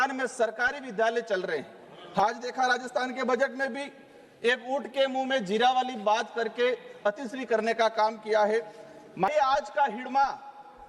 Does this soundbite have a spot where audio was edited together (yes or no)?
yes